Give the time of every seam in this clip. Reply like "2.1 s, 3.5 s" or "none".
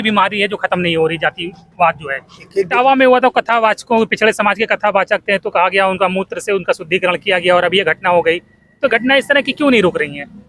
2.7 s